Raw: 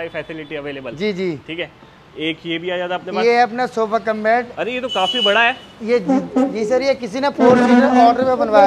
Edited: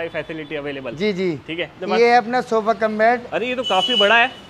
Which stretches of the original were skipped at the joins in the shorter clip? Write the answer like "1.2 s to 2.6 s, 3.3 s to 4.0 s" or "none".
1.8 s to 3.0 s